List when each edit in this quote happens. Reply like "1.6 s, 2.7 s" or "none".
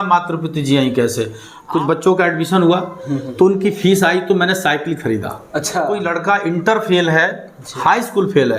1.5 s, 6.0 s